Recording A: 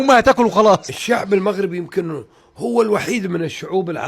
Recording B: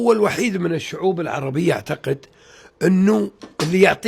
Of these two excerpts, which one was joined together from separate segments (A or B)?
A